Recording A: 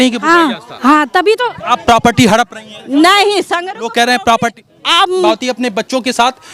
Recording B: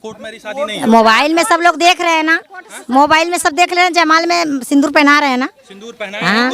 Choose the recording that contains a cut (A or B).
A